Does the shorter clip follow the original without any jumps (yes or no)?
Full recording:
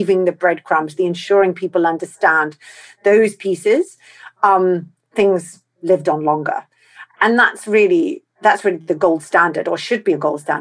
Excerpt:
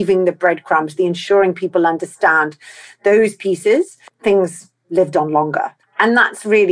no